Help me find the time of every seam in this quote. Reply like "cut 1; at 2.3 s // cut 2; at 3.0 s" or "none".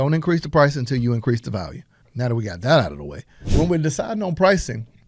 cut 1; at 2.0 s // cut 2; at 3.4 s